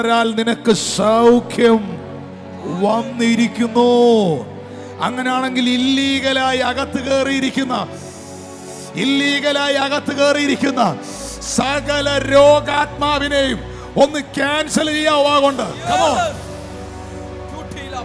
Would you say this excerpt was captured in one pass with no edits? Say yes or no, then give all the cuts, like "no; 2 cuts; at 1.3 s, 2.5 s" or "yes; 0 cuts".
yes; 0 cuts